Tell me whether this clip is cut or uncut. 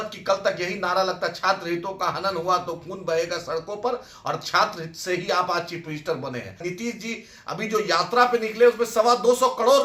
cut